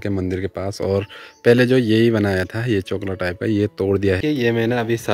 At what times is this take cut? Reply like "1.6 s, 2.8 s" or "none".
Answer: 4.2 s